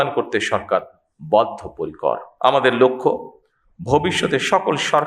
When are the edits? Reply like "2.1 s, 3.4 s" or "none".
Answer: 2.3 s